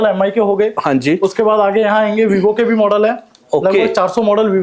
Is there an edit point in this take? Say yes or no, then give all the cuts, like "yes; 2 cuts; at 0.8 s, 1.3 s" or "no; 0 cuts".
no; 0 cuts